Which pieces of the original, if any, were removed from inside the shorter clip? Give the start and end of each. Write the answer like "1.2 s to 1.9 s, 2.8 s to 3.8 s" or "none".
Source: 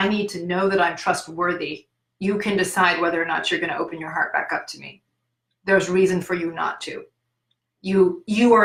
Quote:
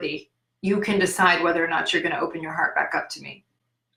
none